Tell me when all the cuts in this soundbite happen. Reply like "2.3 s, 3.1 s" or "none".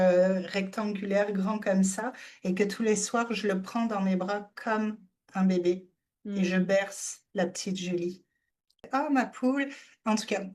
8.8 s